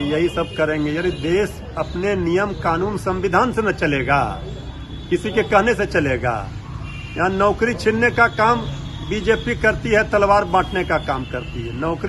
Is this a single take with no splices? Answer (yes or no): yes